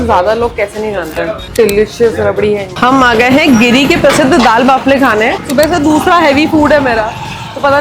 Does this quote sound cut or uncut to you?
cut